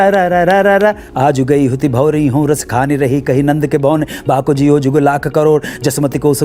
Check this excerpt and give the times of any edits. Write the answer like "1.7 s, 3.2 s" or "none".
1.1 s